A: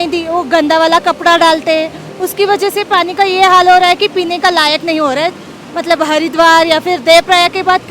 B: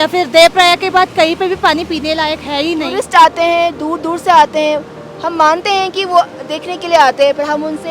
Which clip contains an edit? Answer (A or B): B